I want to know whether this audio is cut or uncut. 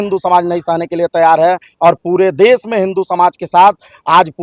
uncut